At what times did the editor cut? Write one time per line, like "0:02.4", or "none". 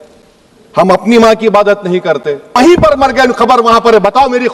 0:02.5